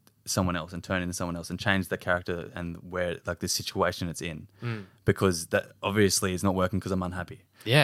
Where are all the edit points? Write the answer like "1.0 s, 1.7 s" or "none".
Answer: none